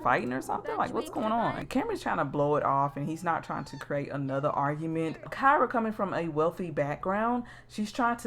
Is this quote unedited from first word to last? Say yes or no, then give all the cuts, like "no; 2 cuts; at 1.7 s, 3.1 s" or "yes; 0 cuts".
no; 2 cuts; at 1.6 s, 5.3 s